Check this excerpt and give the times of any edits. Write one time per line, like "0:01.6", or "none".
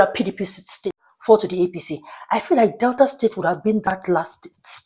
0:00.9